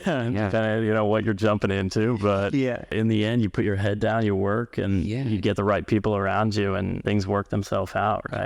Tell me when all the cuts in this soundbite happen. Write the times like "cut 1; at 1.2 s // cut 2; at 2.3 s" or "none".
cut 1; at 2.9 s // cut 2; at 7.0 s